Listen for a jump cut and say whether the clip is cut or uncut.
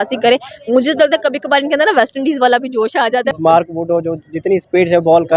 cut